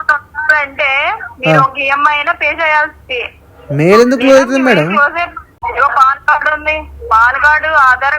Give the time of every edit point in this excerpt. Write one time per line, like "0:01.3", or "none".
0:05.5